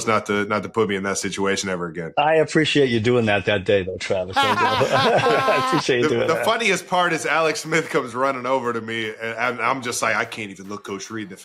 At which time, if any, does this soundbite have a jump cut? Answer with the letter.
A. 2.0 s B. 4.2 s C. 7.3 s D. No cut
A